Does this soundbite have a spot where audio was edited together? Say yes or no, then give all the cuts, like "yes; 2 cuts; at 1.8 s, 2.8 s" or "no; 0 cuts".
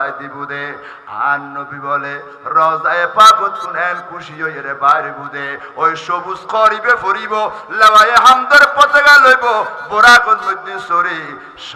no; 0 cuts